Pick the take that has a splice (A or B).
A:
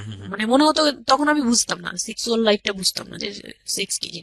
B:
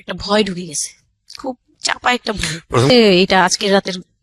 B